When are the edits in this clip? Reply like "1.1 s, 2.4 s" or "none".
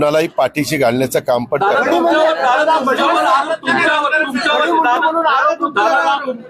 none